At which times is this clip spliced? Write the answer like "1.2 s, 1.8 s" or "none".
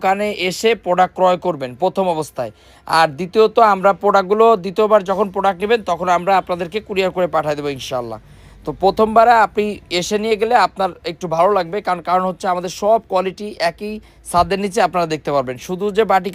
none